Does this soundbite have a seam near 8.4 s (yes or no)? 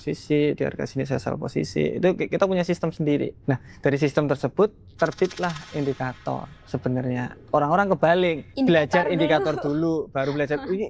yes